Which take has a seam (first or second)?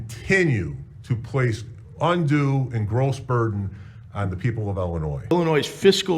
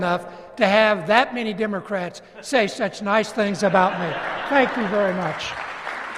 first